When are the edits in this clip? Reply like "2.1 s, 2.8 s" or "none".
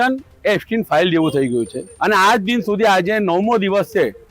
1.8 s